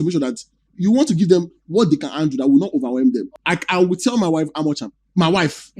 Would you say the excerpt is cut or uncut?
cut